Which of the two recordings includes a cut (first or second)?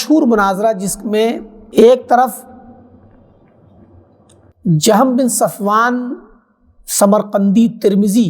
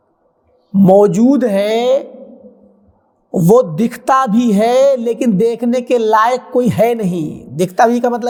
first